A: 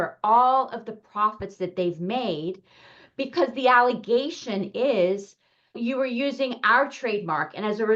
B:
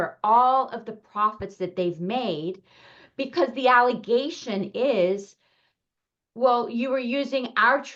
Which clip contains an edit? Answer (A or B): A